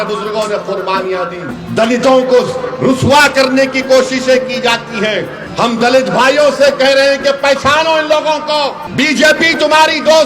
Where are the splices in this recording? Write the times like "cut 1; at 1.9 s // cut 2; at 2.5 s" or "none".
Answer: cut 1; at 1.5 s // cut 2; at 5.4 s // cut 3; at 8.8 s